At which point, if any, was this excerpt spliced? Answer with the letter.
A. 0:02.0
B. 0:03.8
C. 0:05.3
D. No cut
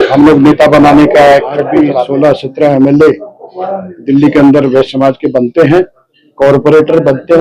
A